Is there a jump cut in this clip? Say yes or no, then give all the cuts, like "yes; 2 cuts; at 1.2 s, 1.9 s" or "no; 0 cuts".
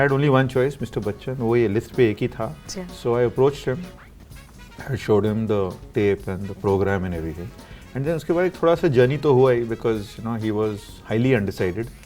no; 0 cuts